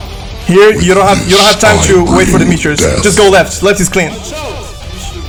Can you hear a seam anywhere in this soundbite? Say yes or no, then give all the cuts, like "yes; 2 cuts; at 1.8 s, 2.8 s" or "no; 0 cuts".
no; 0 cuts